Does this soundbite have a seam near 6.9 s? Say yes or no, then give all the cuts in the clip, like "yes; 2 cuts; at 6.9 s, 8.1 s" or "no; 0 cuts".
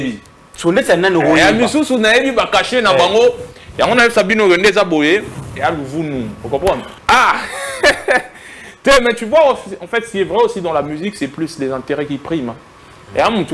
yes; 1 cut; at 6.9 s